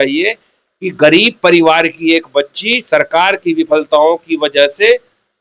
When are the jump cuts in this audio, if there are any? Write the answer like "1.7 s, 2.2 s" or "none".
none